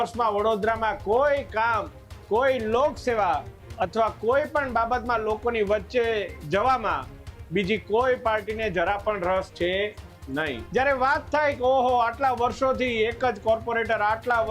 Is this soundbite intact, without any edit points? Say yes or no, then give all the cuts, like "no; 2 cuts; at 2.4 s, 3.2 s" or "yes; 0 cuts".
no; 1 cut; at 10.6 s